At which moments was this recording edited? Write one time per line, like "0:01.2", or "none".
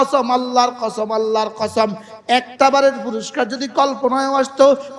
none